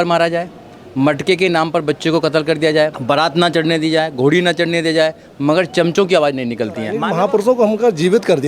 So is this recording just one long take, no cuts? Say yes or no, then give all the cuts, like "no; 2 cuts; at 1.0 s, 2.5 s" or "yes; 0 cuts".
no; 2 cuts; at 3.0 s, 7.0 s